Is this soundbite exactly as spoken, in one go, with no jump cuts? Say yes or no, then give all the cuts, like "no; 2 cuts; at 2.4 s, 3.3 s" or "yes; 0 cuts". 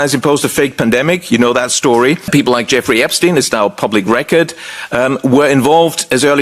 no; 1 cut; at 2.3 s